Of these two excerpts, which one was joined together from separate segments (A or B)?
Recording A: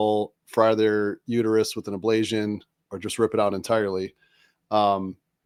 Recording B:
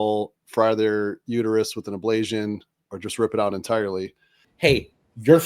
B